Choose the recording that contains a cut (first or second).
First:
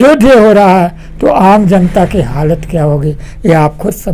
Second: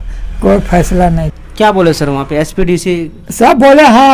second